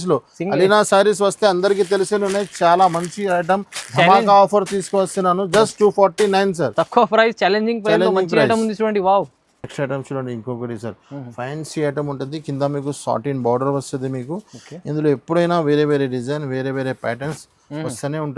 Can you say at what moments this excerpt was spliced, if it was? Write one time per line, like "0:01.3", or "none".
none